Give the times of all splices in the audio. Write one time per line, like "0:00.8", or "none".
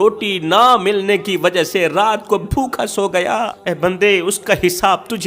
0:03.6